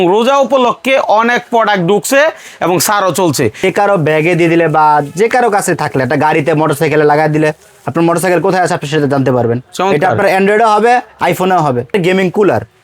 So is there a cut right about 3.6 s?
yes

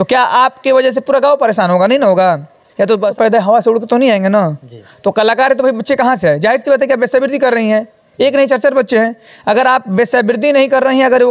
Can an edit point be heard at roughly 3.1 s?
yes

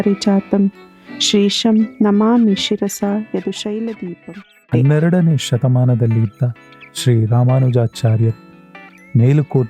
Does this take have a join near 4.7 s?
yes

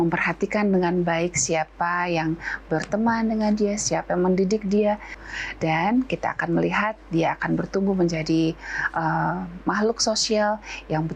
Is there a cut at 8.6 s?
no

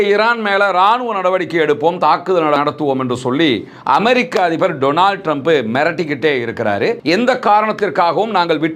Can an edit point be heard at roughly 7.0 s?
yes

